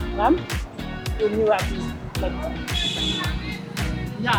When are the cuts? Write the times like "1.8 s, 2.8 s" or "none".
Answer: none